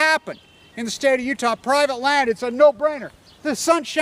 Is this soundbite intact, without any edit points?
no; 1 cut; at 1.2 s

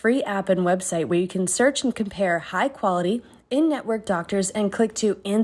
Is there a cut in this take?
no; 0 cuts

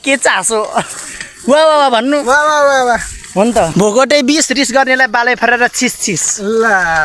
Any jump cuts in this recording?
yes; 1 cut; at 3.7 s

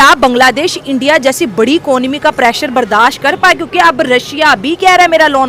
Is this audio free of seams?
yes; 0 cuts

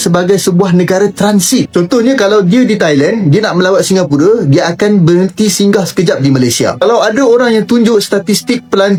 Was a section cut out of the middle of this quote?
no; 0 cuts

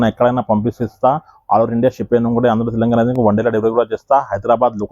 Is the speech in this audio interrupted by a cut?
no; 0 cuts

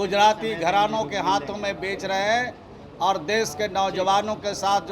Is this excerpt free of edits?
yes; 0 cuts

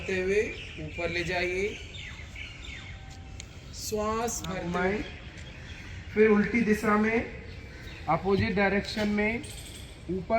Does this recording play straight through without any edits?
no; 1 cut; at 4.6 s

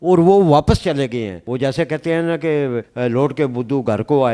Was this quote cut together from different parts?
no; 0 cuts

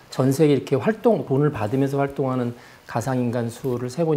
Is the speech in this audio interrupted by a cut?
yes; 1 cut; at 1.2 s

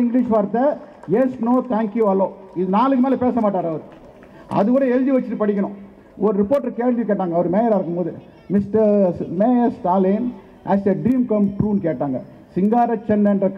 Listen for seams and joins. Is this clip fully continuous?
yes; 0 cuts

